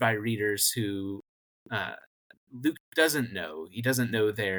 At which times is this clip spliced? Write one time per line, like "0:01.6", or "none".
none